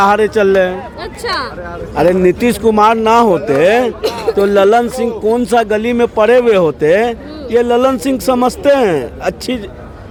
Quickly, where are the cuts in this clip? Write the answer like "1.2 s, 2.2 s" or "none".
none